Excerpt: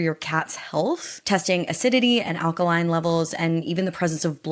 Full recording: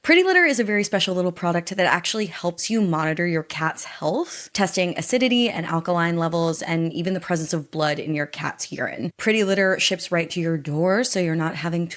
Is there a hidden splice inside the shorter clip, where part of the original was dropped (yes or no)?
no